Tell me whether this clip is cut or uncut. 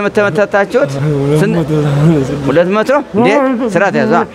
cut